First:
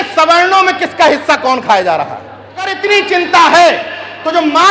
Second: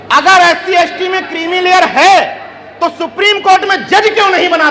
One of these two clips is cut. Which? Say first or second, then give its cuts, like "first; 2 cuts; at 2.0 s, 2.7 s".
first; 1 cut; at 2.8 s